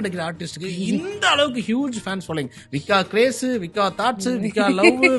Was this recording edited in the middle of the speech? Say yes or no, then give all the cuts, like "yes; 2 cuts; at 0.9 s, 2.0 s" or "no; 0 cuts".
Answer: no; 0 cuts